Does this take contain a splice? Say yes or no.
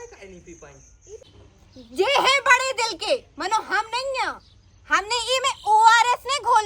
yes